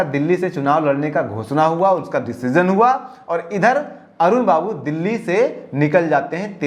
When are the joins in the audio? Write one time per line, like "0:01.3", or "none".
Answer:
none